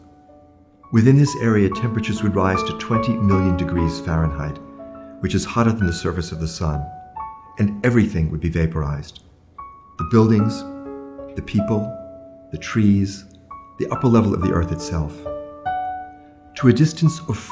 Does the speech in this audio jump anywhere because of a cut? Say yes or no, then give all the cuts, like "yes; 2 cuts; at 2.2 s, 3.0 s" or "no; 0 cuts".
no; 0 cuts